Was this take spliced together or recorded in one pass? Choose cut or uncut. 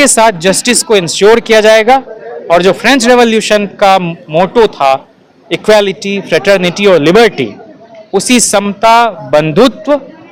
uncut